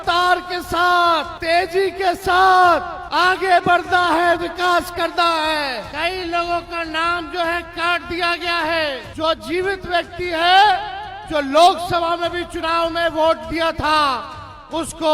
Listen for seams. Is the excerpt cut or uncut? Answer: cut